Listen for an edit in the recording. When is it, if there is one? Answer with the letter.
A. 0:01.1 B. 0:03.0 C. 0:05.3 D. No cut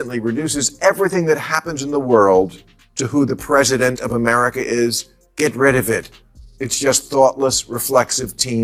D